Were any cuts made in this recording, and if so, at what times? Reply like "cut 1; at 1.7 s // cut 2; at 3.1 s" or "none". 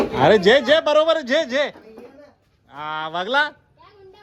none